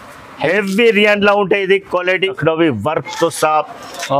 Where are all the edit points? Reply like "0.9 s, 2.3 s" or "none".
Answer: 2.4 s